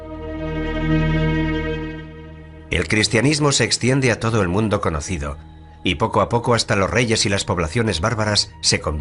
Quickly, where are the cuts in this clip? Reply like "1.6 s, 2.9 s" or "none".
6.1 s

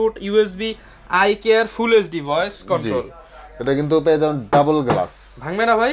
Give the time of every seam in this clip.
none

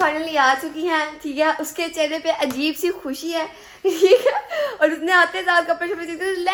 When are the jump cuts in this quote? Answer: none

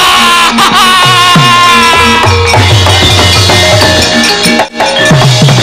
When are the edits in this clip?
none

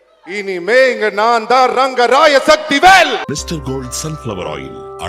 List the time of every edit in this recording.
3.2 s

